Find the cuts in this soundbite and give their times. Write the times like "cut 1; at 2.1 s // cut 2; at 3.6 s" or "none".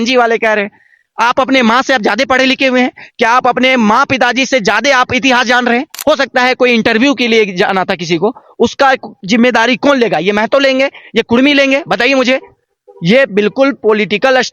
cut 1; at 5.9 s